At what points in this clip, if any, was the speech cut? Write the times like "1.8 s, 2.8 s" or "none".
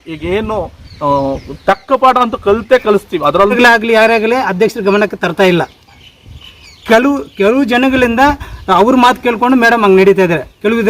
3.5 s